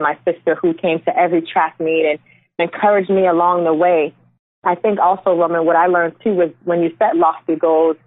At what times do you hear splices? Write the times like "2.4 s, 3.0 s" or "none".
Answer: 2.6 s, 4.5 s